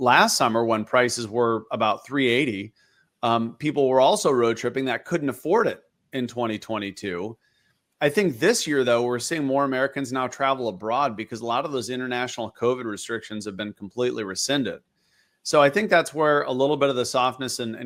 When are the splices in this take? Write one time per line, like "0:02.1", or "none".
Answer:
none

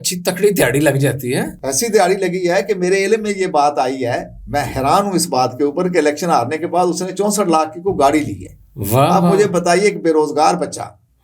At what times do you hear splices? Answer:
none

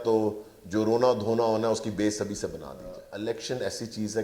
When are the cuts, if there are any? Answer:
0:03.1

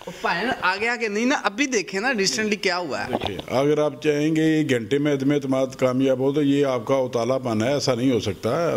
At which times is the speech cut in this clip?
none

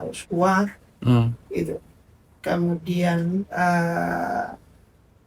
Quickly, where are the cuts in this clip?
none

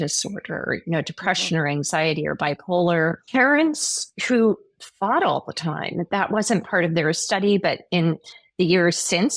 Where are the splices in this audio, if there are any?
0:03.2

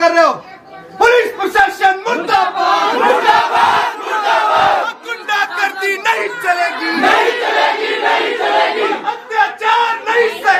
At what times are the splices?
none

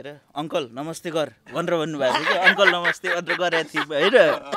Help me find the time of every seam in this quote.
none

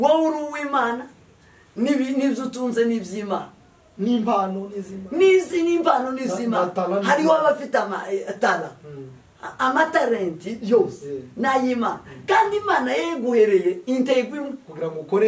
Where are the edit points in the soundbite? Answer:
none

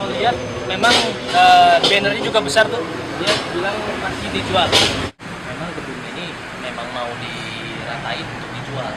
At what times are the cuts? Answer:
0:05.2

